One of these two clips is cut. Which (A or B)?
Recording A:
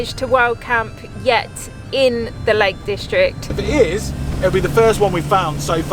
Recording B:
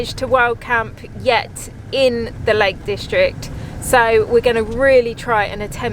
A